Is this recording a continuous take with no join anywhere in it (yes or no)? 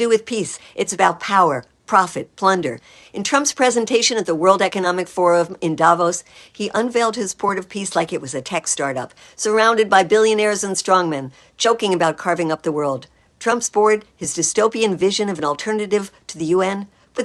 yes